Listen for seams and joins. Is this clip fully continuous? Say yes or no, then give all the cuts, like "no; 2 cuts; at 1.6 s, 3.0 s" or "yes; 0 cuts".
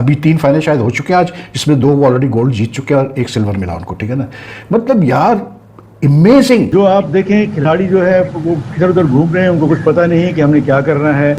no; 1 cut; at 6.7 s